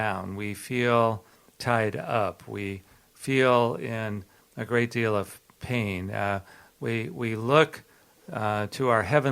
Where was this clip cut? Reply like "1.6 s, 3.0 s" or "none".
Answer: none